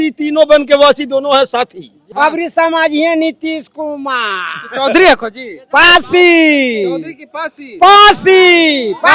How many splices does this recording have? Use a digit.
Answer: 1